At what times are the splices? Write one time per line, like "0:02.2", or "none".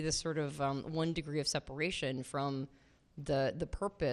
none